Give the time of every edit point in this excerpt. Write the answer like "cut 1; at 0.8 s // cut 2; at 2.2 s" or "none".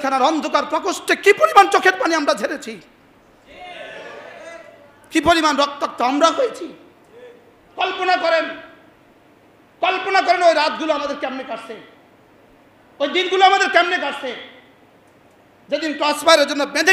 none

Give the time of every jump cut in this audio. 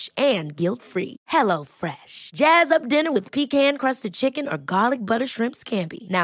none

